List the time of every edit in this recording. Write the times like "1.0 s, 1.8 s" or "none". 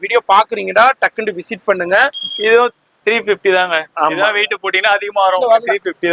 2.2 s